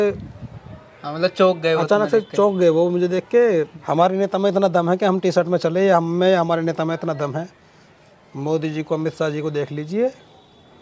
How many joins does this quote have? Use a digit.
1